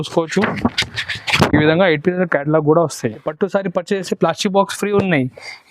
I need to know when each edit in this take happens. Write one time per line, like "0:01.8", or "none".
0:03.2